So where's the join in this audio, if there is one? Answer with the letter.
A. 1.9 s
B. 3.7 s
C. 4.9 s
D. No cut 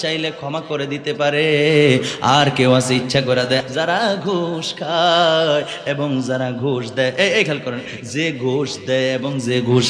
B